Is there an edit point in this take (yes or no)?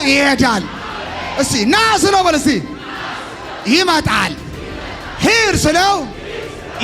no